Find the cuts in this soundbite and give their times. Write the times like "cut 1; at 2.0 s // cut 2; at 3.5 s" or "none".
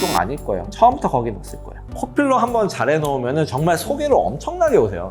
cut 1; at 1.9 s